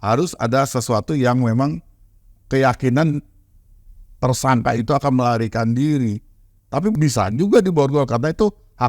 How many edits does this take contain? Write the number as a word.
one